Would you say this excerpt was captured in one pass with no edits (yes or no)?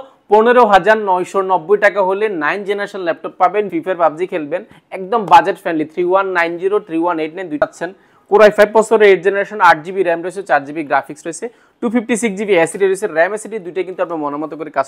no